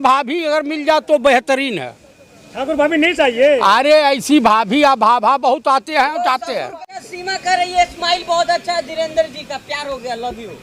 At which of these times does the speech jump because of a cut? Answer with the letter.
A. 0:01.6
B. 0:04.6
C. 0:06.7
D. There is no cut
C